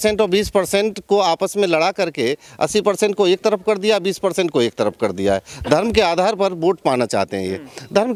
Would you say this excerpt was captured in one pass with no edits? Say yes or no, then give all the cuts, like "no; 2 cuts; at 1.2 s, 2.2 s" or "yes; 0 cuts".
yes; 0 cuts